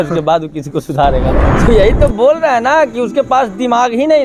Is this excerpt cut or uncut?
cut